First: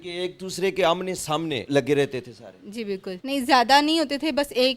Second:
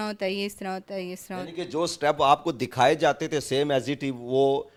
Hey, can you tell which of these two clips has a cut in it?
first; 2 cuts; at 1.6 s, 3.1 s

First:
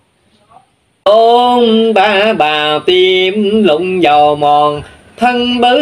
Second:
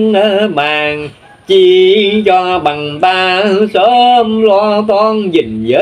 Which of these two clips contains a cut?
first; 1 cut; at 1.1 s

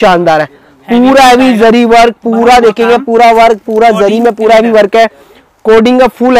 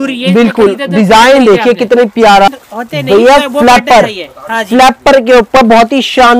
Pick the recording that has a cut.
second; 1 cut; at 2.5 s

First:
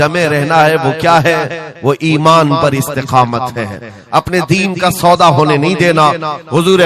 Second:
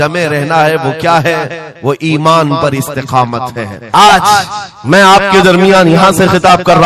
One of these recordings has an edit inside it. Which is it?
second; 1 cut; at 3.7 s

